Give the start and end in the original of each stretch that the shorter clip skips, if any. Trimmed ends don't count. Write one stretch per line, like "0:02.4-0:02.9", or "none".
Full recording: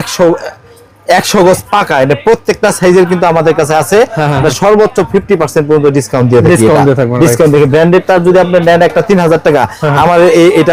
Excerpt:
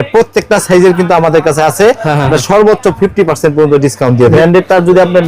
0:06.5-0:07.7